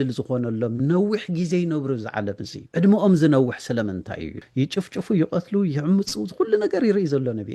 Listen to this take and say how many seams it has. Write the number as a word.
two